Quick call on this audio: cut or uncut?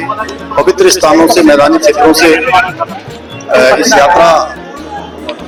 uncut